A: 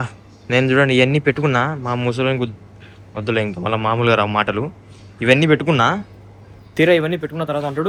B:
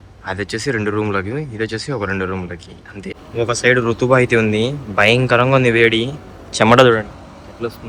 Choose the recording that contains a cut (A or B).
B